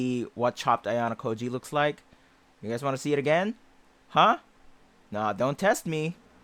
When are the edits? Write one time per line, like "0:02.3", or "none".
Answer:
none